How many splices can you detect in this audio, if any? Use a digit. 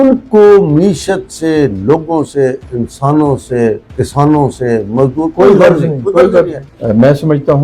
1